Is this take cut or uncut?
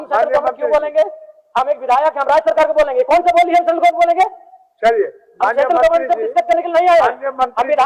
uncut